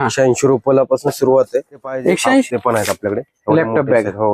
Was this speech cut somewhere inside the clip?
yes; 1 cut; at 2.5 s

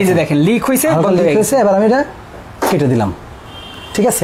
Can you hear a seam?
no; 0 cuts

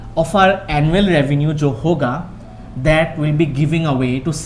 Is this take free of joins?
yes; 0 cuts

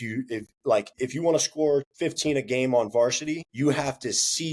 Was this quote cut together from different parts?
yes; 3 cuts; at 0.9 s, 1.9 s, 3.5 s

